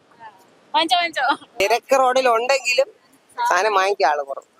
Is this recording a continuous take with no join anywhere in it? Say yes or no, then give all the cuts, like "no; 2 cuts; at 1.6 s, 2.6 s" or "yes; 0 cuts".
no; 1 cut; at 1.6 s